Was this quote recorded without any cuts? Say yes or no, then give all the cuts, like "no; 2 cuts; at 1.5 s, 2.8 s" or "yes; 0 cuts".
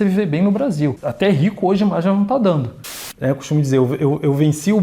no; 1 cut; at 2.9 s